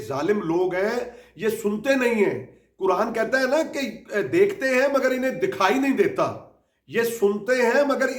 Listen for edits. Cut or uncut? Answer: uncut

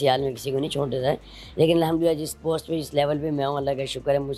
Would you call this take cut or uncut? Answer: uncut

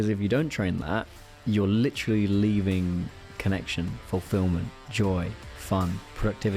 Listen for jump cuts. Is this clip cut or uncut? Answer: cut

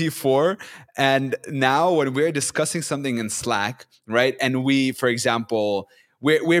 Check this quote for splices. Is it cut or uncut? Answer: uncut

